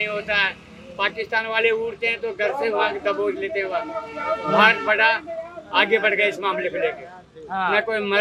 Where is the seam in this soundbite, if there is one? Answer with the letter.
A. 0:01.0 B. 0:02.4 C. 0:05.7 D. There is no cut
D